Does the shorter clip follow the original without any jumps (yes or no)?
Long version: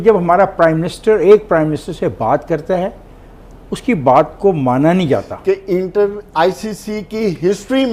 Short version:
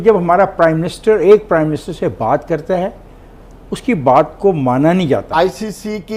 no